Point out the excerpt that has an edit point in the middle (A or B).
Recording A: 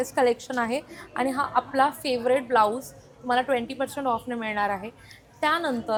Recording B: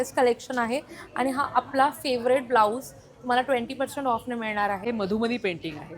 B